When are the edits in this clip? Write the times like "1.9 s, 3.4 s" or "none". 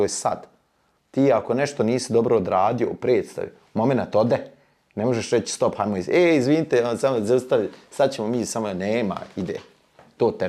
none